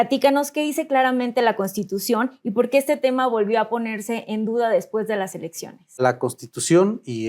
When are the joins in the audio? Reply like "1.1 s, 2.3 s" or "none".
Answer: 6.0 s

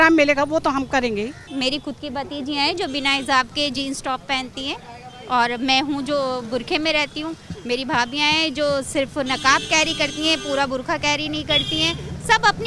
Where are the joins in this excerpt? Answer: 1.5 s

